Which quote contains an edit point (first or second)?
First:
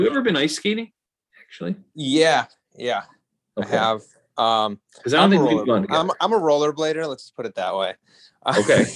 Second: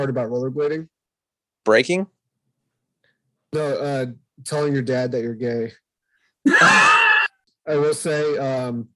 second